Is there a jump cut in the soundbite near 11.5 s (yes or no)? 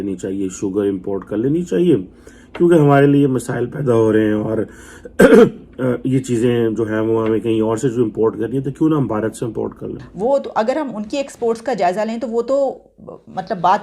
no